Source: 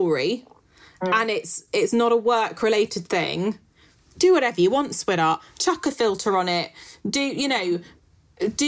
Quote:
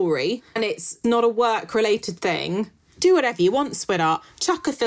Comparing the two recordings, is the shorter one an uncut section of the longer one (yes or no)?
no